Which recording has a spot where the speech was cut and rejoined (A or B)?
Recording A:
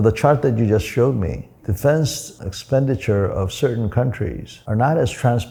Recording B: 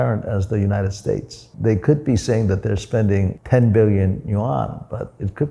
B